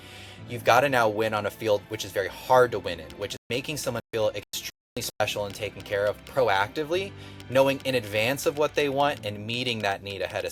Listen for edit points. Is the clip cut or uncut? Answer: uncut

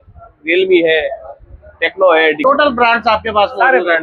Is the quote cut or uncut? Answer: cut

